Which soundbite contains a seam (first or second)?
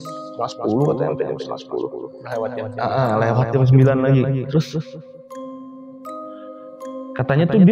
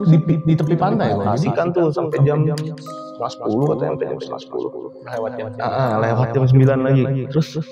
second